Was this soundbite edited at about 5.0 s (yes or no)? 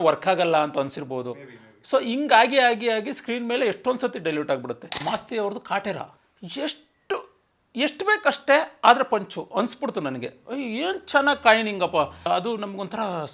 yes